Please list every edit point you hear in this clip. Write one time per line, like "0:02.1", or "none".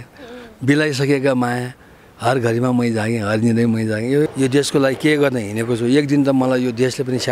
0:04.3